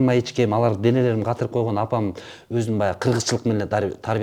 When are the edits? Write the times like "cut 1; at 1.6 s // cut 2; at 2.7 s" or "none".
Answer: none